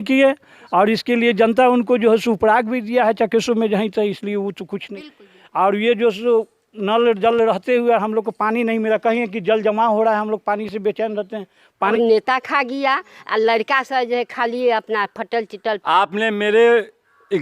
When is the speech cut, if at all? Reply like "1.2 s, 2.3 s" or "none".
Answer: 5.0 s, 11.9 s, 15.8 s